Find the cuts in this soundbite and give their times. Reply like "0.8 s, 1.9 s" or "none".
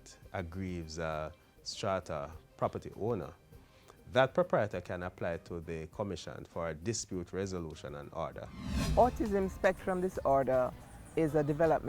8.6 s